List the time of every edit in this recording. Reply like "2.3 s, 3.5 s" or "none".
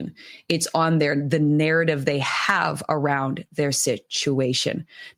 none